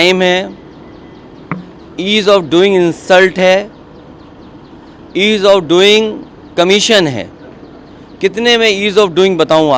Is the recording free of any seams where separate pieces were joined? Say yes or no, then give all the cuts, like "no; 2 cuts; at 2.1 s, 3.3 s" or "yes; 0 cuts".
yes; 0 cuts